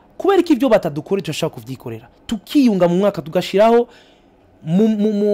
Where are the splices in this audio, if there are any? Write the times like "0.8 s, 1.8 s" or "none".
none